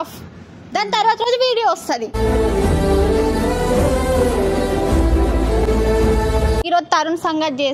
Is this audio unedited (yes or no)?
yes